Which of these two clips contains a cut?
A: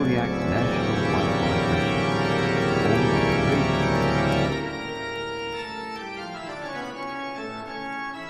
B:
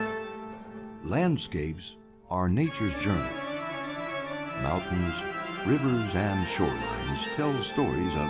A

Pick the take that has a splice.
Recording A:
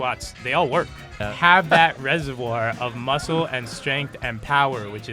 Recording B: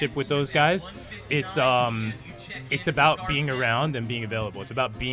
A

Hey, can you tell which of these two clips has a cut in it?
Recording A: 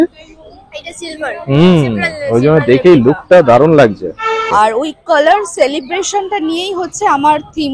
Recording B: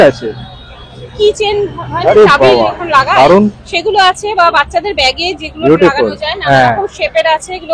A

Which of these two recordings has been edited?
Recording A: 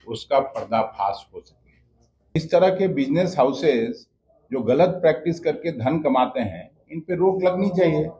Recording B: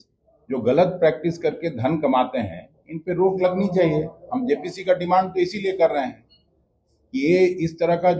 A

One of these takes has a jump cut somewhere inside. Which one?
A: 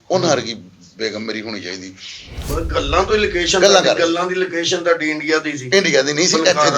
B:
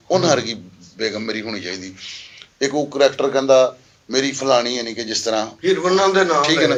A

